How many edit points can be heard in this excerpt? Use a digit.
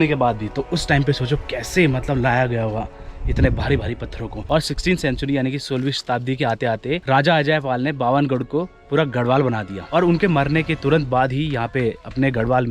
2